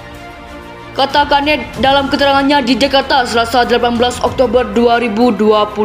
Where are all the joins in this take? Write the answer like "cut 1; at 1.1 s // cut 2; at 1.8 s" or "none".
cut 1; at 0.9 s